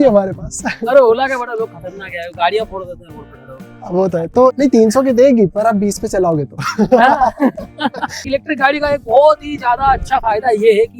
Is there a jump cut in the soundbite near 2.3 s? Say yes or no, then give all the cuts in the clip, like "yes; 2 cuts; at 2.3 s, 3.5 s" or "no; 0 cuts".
no; 2 cuts; at 4.5 s, 8.3 s